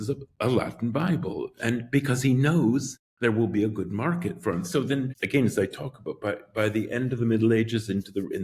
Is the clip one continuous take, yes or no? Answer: no